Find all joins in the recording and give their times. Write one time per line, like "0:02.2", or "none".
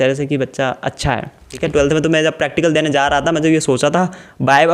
0:01.5